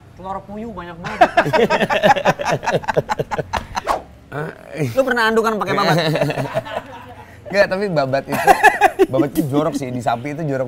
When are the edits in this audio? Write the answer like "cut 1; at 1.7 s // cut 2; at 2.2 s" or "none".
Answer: cut 1; at 3.9 s